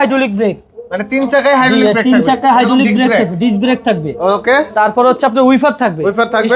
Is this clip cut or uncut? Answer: uncut